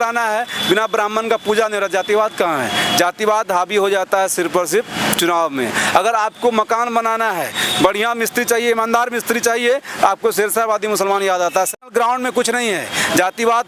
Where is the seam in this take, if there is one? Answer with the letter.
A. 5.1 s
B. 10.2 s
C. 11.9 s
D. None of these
C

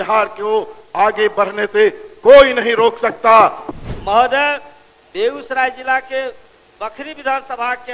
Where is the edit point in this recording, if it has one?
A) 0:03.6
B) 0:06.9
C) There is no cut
A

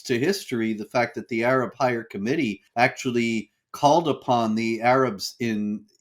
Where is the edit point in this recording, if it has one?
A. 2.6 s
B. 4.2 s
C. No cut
A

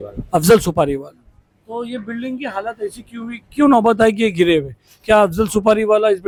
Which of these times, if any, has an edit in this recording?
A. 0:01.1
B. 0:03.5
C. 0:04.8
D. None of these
D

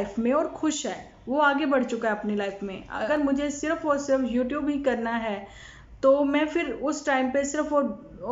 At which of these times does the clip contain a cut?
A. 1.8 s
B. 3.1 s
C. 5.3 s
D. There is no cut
B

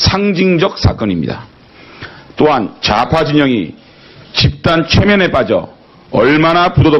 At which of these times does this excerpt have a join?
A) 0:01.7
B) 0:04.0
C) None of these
A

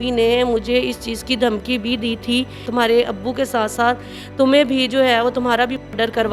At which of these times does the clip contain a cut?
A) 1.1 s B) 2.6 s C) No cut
B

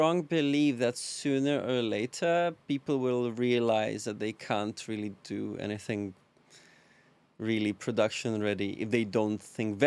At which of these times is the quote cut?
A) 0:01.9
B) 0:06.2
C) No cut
C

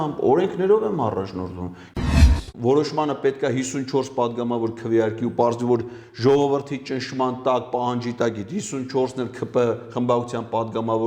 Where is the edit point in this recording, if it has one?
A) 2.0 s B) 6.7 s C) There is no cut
A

